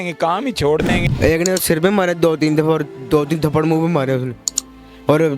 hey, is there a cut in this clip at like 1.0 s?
yes; 1 cut; at 1.0 s

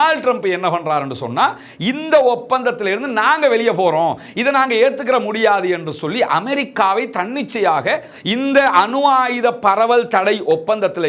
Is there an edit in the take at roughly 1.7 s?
no; 0 cuts

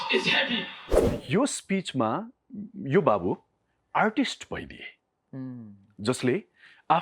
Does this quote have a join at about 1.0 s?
yes; 1 cut; at 1.0 s

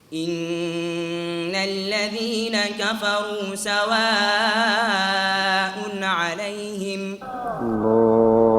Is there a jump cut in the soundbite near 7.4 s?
yes; 1 cut; at 7.4 s

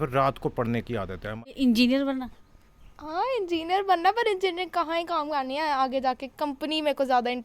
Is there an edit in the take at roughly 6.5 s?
no; 1 cut; at 1.3 s

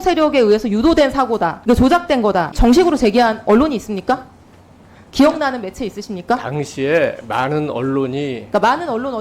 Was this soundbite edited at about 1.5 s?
yes; 2 cuts; at 1.5 s, 2.5 s

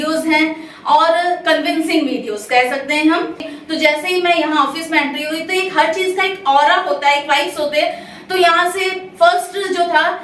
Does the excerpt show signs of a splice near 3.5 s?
yes; 1 cut; at 3.5 s

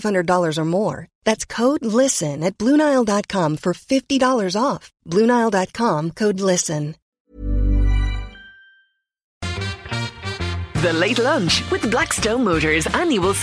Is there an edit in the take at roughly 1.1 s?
no; 2 cuts; at 7.0 s, 9.4 s

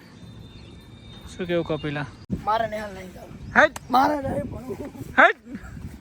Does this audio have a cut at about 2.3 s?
yes; 1 cut; at 2.3 s

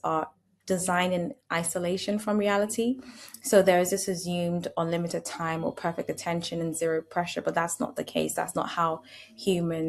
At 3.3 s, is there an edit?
no; 0 cuts

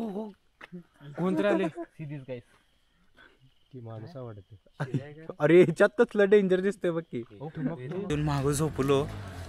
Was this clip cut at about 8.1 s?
yes; 1 cut; at 8.1 s

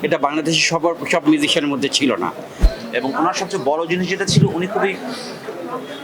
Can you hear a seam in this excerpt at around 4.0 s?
no; 1 cut; at 2.7 s

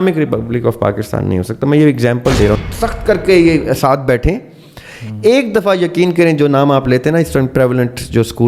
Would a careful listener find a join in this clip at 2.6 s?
yes; 1 cut; at 2.6 s

